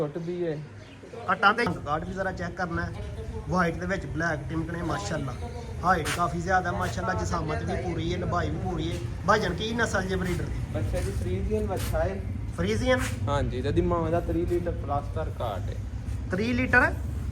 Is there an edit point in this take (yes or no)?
yes